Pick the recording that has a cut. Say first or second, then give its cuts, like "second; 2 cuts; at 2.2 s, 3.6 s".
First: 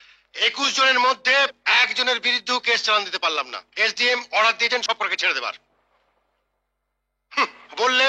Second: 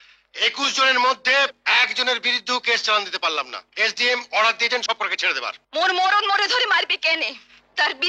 second; 1 cut; at 5.5 s